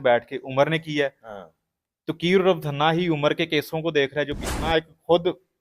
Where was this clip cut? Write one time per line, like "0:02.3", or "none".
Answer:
0:04.6